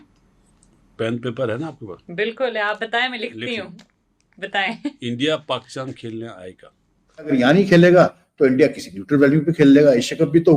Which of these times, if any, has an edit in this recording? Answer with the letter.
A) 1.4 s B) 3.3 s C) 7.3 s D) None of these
C